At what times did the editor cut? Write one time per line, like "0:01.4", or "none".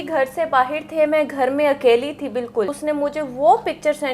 0:02.8